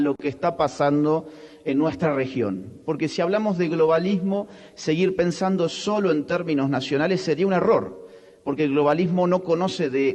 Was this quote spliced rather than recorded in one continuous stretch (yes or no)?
no